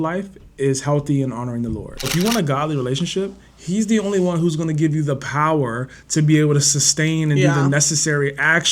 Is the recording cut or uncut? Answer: cut